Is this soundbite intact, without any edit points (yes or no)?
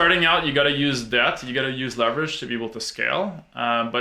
yes